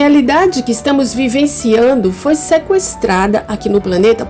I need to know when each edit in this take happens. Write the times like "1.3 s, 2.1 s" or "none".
none